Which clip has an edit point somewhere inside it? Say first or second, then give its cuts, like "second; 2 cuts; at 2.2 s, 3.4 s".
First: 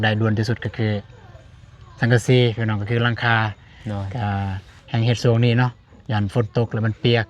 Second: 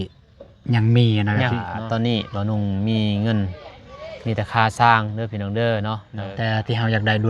second; 2 cuts; at 1.7 s, 6.1 s